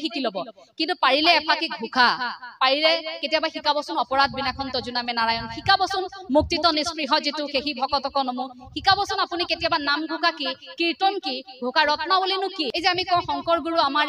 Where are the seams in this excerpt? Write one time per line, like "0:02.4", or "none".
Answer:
0:12.7